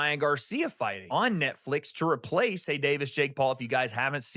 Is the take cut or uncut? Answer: cut